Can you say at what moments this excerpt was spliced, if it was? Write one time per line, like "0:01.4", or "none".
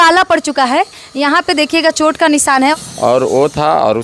0:02.7